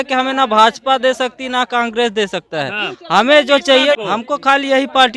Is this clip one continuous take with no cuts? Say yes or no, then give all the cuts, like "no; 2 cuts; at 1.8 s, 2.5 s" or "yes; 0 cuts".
no; 1 cut; at 4.0 s